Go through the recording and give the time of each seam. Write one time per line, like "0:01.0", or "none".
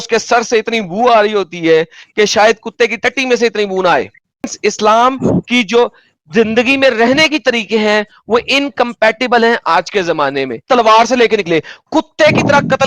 0:04.5
0:10.6